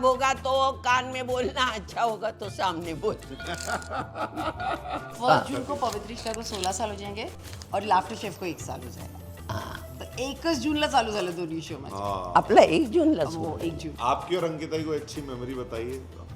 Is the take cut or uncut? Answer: uncut